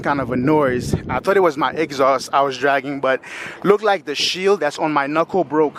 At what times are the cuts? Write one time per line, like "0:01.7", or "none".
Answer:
none

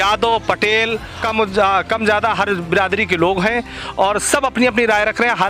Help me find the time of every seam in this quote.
0:01.2

